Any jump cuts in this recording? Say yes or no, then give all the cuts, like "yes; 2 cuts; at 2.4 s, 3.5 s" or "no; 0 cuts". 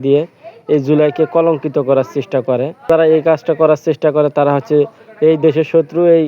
yes; 1 cut; at 2.9 s